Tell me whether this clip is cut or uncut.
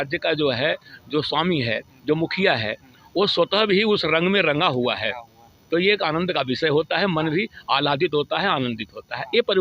uncut